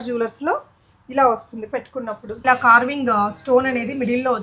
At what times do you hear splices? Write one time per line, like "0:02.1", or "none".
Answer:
0:02.3